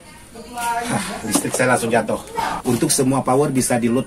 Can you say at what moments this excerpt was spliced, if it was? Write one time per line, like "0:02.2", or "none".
0:02.5